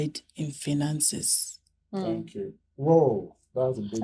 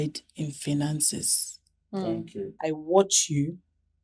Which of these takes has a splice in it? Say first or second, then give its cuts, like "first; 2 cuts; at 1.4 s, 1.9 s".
second; 1 cut; at 2.5 s